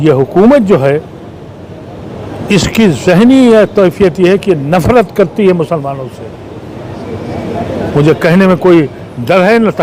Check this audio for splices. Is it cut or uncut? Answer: uncut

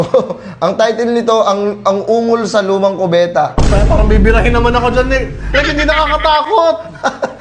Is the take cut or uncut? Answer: uncut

